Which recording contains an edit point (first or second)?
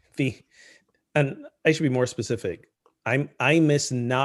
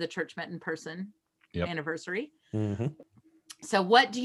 second